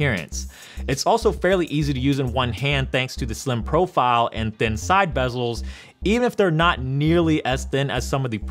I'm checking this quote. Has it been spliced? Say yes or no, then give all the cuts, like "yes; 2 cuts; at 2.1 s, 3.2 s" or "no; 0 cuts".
yes; 1 cut; at 5.9 s